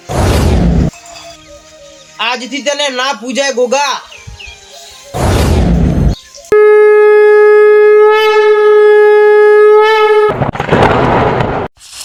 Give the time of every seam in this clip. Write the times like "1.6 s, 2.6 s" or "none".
none